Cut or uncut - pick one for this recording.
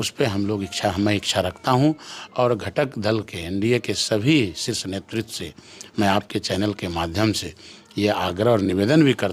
uncut